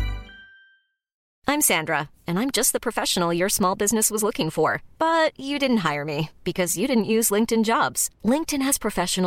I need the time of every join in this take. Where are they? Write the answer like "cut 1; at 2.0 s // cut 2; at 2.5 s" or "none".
cut 1; at 1.3 s

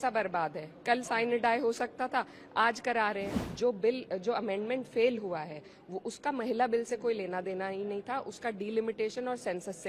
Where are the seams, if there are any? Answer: cut 1; at 3.4 s

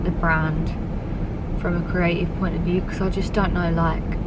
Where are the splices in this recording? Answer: none

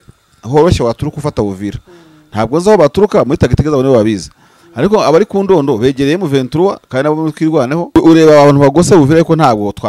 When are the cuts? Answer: cut 1; at 8.0 s

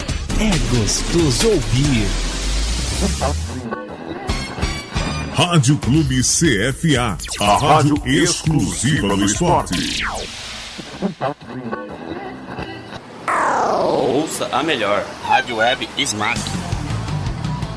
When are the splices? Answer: cut 1; at 16.3 s

